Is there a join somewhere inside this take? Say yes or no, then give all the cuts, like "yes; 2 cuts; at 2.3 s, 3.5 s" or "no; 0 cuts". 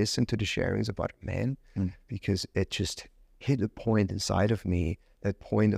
no; 0 cuts